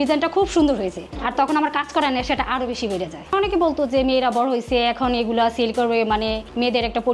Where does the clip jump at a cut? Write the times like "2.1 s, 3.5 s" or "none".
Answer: 1.1 s, 3.2 s